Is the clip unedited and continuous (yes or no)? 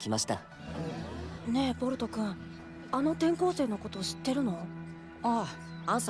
no